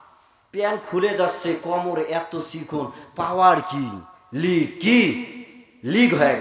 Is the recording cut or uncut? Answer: uncut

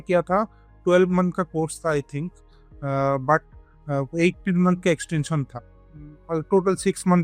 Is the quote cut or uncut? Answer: uncut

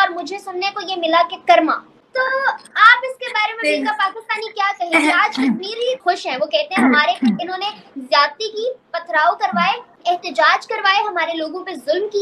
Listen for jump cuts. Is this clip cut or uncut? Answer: uncut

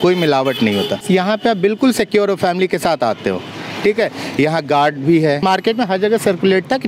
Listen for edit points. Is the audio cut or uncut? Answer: cut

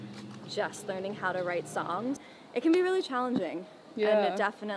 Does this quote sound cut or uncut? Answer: cut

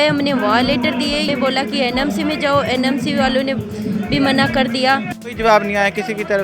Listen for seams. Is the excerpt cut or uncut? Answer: cut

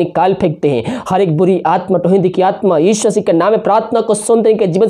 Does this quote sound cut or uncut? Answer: uncut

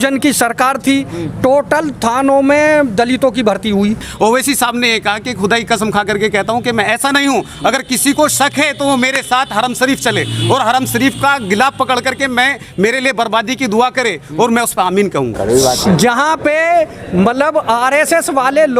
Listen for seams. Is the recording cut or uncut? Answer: cut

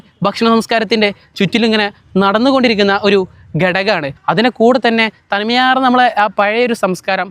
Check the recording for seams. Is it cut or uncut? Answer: cut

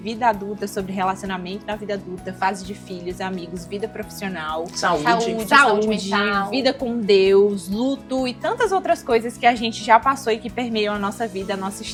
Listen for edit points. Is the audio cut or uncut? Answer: uncut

